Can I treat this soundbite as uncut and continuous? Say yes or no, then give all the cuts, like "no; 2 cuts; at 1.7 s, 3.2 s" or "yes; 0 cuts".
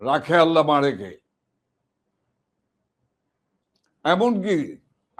yes; 0 cuts